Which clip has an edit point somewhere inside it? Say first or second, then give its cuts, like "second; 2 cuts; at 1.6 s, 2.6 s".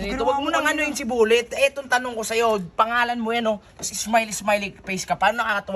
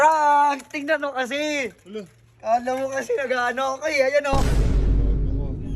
second; 1 cut; at 4.4 s